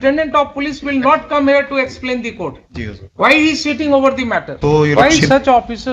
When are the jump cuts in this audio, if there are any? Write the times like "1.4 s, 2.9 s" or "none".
4.5 s